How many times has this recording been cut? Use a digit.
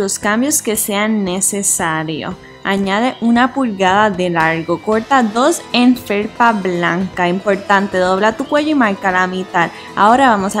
2